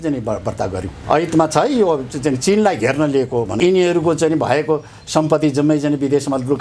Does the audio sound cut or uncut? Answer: cut